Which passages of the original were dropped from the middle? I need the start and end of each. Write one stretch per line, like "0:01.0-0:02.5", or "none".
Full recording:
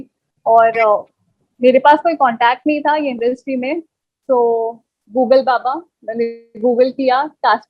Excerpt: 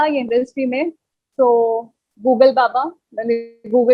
none